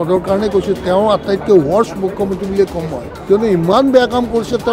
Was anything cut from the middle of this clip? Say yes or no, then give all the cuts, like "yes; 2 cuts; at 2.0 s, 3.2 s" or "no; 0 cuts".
yes; 1 cut; at 3.1 s